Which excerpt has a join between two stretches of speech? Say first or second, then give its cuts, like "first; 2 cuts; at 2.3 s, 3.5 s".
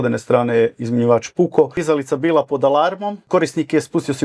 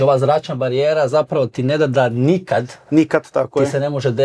first; 2 cuts; at 1.8 s, 3.2 s